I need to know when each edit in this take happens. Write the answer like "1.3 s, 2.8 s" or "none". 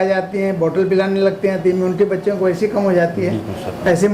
none